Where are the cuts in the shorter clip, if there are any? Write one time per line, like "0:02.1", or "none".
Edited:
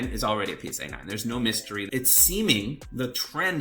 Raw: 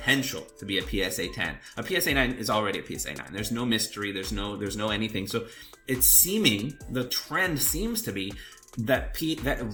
0:01.9